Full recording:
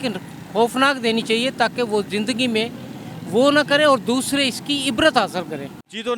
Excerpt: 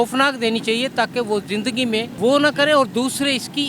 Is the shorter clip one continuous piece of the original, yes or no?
no